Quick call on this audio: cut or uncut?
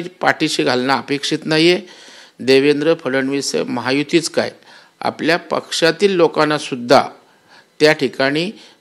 uncut